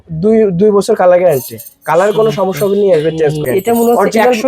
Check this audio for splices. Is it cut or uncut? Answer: cut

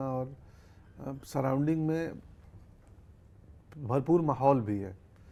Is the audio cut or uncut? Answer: uncut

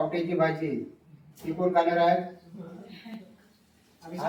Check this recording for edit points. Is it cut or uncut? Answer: uncut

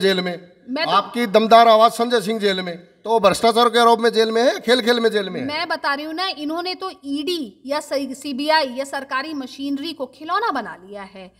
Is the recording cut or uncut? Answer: uncut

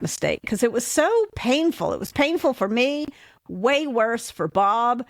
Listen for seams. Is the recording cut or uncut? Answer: uncut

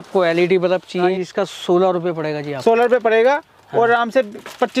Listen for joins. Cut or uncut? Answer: cut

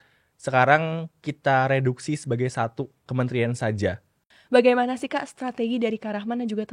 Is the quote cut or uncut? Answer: cut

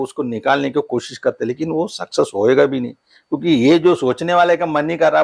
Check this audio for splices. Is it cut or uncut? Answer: uncut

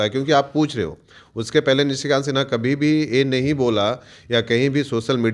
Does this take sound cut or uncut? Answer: uncut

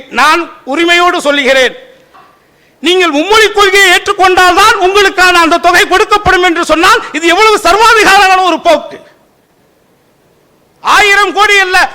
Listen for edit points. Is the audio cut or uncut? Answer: cut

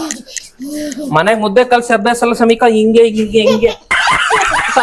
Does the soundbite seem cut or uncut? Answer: uncut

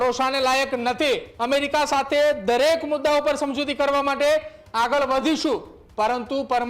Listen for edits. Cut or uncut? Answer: cut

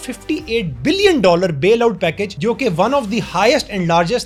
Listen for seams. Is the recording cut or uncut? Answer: uncut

